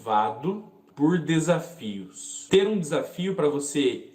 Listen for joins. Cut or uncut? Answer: cut